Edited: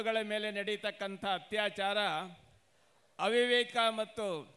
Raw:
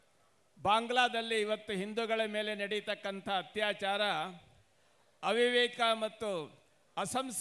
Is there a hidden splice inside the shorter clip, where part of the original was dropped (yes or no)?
no